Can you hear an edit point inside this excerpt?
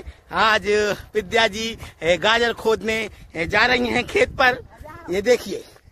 no; 0 cuts

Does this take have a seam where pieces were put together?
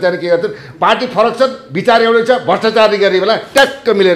no; 0 cuts

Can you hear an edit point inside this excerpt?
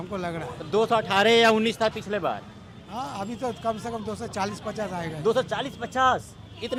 no; 0 cuts

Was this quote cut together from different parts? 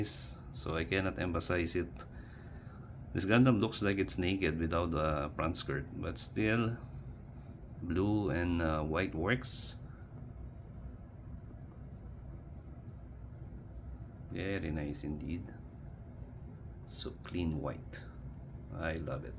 no; 0 cuts

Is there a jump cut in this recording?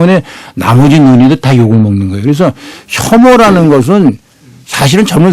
no; 0 cuts

